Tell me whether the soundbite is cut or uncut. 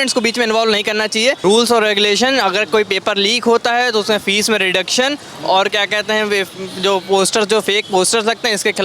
cut